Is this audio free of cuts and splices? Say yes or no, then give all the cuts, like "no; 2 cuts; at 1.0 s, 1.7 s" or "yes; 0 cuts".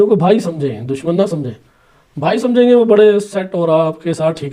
yes; 0 cuts